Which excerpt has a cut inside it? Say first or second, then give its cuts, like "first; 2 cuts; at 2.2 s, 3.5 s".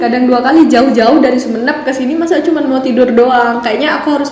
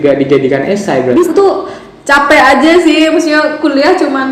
second; 1 cut; at 1.3 s